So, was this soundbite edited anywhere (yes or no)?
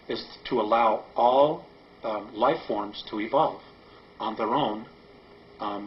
yes